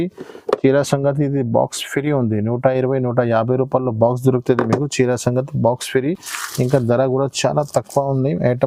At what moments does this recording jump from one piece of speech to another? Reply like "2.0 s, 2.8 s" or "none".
none